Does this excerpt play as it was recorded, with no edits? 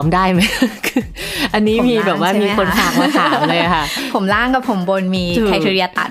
yes; 0 cuts

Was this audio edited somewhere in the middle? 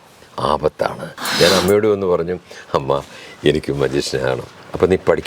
yes; 1 cut; at 1.2 s

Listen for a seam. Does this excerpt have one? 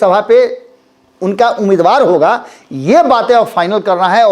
no; 0 cuts

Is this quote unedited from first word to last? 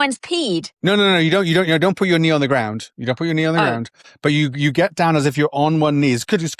yes; 0 cuts

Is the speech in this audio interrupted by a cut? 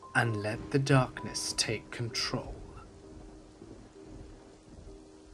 yes; 1 cut; at 1.2 s

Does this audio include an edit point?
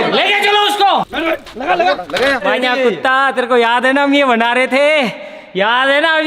yes; 2 cuts; at 1.0 s, 2.4 s

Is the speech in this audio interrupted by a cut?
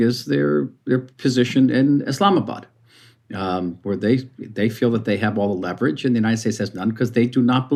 no; 0 cuts

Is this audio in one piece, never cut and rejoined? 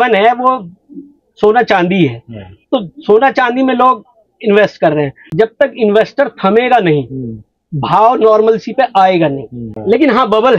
no; 2 cuts; at 5.2 s, 9.7 s

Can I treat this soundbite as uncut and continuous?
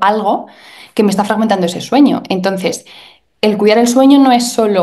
yes; 0 cuts

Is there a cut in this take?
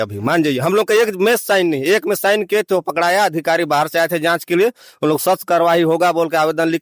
no; 0 cuts

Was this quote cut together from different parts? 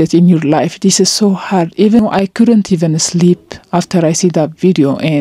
yes; 1 cut; at 2.0 s

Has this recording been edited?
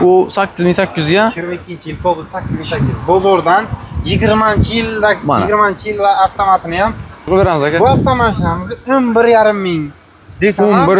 yes; 1 cut; at 7.2 s

